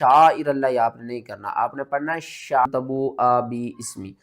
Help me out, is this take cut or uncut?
cut